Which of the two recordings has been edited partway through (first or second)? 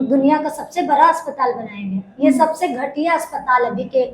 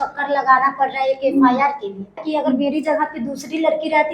second